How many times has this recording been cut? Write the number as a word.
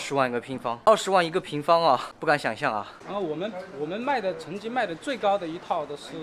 three